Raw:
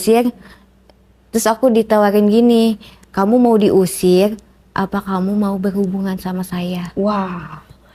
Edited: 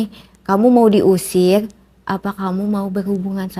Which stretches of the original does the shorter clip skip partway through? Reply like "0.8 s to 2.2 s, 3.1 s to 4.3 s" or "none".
none